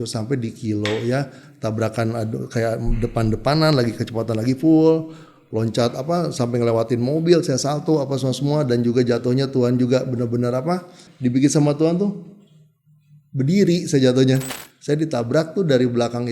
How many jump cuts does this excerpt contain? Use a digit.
3